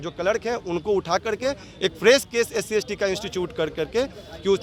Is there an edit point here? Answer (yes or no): no